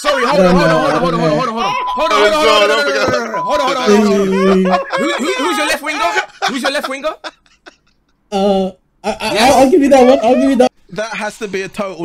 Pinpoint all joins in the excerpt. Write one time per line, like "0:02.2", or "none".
0:10.7